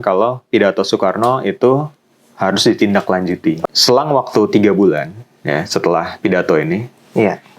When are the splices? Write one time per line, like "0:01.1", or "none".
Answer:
0:03.6